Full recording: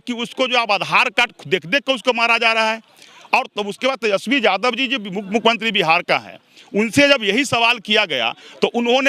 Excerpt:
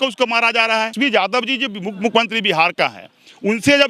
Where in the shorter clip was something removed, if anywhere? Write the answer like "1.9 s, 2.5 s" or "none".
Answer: 0.9 s